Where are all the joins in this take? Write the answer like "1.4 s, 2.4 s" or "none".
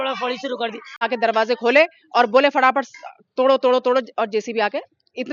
1.0 s